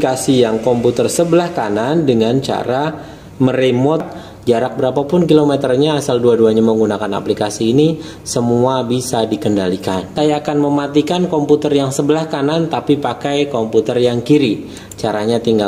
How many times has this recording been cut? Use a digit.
2